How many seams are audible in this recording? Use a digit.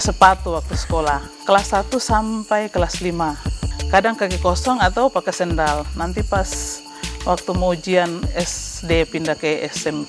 2